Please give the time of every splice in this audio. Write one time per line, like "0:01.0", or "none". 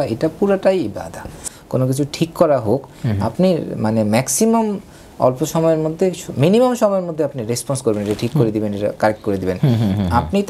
0:01.4